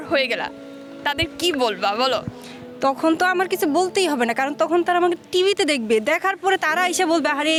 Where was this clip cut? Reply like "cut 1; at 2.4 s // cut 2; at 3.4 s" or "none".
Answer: none

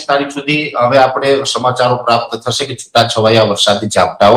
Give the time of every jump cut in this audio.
none

